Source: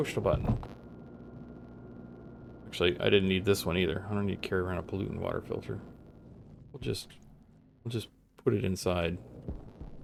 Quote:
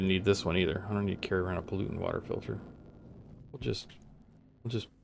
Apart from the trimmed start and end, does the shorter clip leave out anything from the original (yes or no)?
no